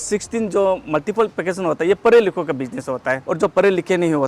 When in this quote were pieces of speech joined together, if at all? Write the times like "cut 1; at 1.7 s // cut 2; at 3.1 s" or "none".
cut 1; at 3.2 s